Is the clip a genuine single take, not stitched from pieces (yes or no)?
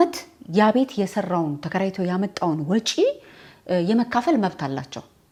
yes